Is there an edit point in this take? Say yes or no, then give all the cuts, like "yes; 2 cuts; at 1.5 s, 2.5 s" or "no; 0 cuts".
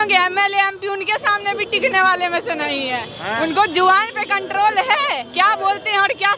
no; 0 cuts